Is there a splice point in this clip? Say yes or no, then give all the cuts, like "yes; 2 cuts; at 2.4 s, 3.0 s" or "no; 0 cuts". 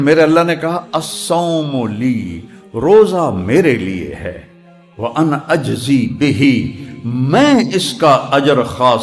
no; 0 cuts